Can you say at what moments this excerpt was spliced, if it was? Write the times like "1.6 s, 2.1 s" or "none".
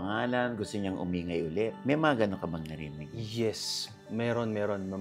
none